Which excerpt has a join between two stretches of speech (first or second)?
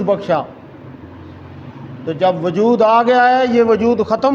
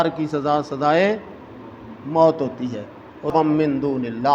second